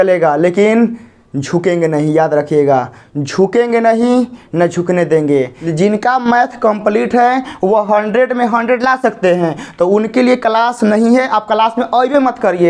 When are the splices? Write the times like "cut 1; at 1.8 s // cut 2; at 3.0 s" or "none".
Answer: cut 1; at 5.6 s